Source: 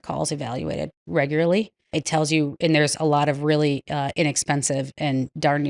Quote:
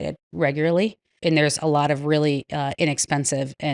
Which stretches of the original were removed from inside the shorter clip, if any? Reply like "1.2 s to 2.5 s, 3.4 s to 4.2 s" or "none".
1.9 s to 2.5 s